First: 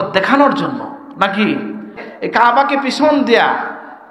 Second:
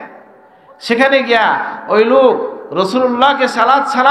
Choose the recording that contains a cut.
first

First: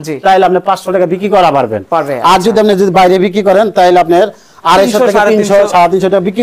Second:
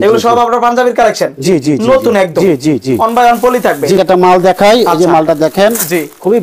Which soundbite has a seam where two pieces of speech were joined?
second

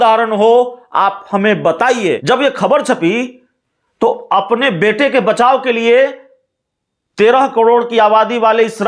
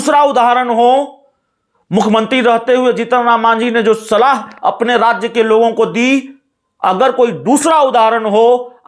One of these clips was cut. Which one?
first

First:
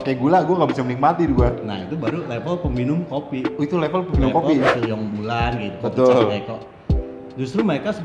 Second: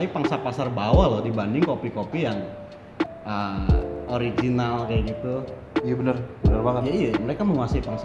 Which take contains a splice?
first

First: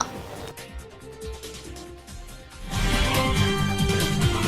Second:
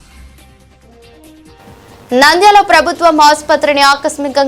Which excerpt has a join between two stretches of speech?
first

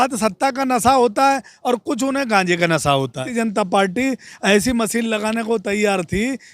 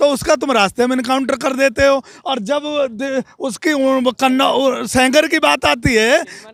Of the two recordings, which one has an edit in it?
first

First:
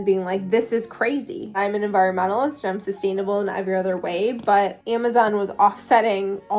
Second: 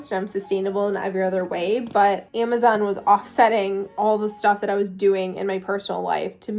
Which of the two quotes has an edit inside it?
first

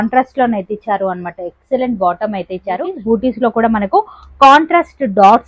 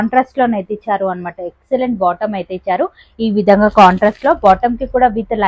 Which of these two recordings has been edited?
first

